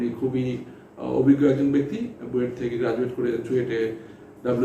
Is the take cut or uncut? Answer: uncut